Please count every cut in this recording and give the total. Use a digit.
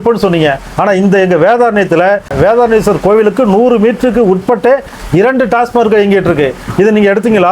1